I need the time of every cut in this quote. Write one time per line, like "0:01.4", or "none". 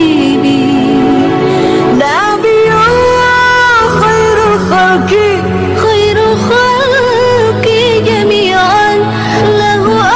none